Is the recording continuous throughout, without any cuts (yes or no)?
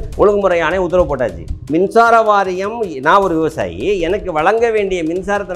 no